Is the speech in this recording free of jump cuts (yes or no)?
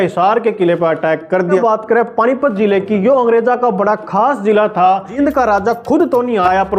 no